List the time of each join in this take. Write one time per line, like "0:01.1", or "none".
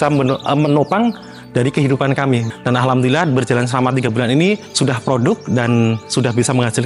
0:02.5